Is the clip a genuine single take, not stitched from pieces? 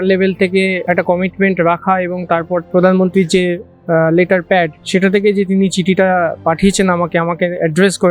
no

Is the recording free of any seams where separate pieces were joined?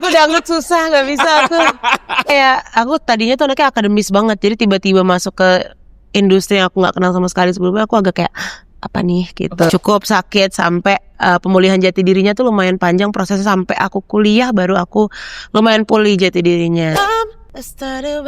no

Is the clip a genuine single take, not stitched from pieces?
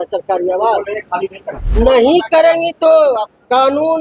no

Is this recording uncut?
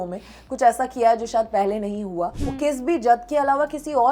no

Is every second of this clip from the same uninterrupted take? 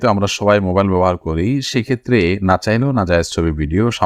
yes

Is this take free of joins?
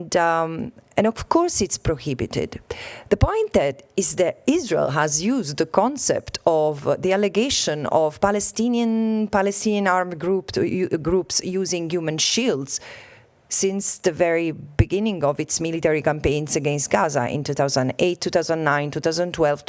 yes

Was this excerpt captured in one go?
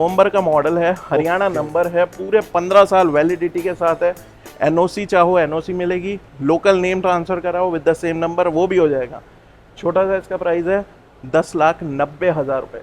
yes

